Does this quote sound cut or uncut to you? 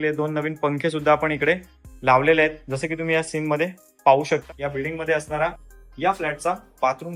cut